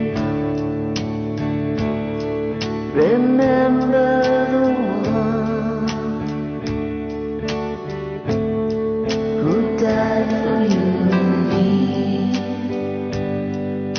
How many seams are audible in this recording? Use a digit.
0